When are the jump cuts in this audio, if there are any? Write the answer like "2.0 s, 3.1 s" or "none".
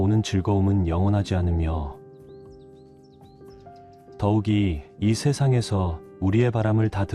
none